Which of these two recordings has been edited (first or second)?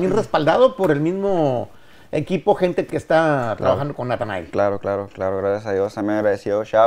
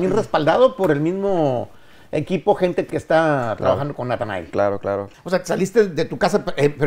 second